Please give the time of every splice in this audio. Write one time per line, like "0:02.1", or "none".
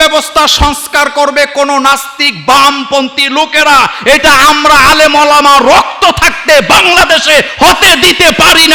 none